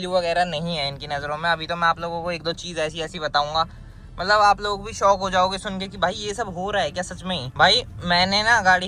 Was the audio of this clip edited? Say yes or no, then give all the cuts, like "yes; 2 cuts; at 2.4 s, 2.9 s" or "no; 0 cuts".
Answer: no; 0 cuts